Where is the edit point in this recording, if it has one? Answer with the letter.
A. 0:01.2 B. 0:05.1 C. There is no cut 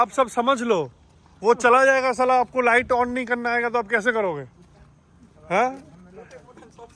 C